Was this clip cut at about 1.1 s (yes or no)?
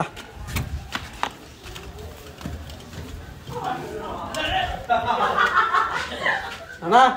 no